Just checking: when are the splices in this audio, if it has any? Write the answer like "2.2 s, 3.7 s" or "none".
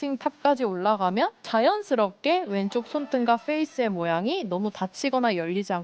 1.4 s